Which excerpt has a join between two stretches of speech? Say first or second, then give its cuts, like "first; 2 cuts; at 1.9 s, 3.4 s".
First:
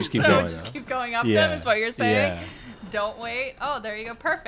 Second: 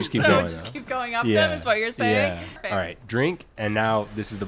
second; 1 cut; at 2.6 s